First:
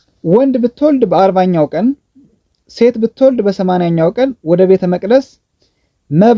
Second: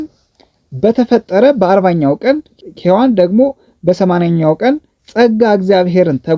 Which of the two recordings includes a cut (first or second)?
second